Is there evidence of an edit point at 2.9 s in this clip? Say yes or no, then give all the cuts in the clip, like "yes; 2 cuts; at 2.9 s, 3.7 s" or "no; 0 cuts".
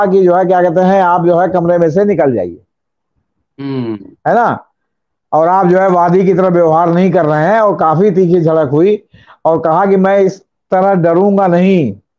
no; 0 cuts